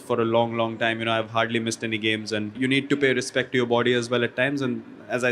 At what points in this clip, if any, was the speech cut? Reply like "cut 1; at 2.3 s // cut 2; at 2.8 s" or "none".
cut 1; at 2.6 s

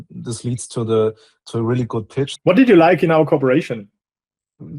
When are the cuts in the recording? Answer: cut 1; at 2.3 s

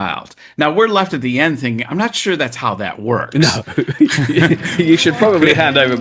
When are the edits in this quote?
none

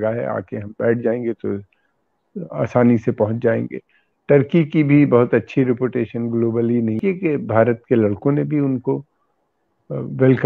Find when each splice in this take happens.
cut 1; at 7.0 s

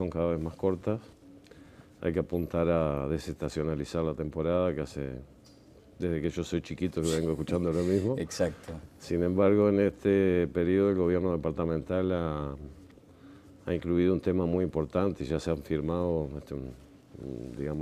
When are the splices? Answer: cut 1; at 6.5 s

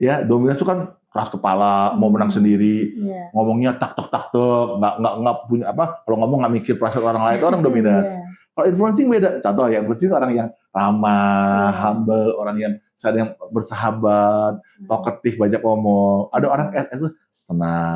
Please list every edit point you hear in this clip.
none

